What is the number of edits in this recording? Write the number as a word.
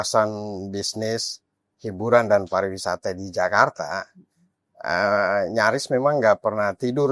zero